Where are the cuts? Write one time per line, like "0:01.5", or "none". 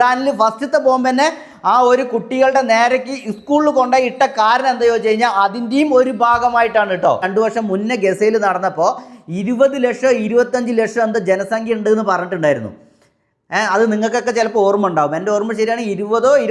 0:07.3